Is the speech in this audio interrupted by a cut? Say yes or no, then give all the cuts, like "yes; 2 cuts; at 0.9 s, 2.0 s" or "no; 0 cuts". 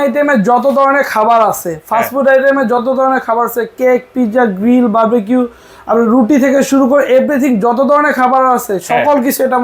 no; 0 cuts